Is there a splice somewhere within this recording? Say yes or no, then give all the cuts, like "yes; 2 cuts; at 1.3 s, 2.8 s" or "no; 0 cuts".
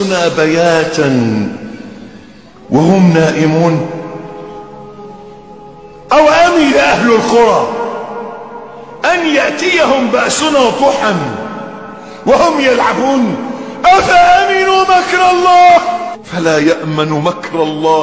no; 0 cuts